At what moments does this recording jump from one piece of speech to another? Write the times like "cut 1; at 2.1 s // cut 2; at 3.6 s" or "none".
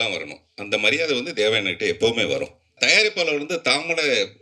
cut 1; at 2.8 s